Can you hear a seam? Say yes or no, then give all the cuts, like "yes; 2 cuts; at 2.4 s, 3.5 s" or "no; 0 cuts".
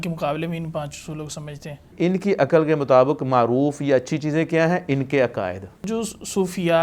yes; 2 cuts; at 1.9 s, 5.9 s